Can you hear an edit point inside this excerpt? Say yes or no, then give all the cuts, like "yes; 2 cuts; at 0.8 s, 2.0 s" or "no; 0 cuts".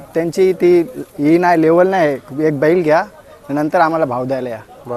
no; 0 cuts